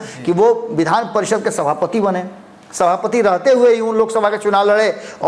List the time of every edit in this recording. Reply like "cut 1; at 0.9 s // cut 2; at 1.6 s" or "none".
none